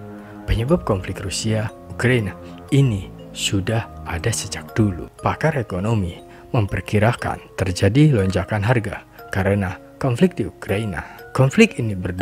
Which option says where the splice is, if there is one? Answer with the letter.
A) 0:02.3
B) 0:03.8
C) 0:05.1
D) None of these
C